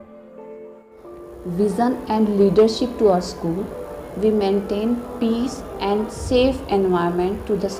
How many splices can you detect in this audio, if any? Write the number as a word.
one